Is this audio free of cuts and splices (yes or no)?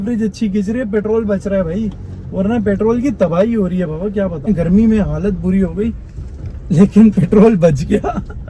no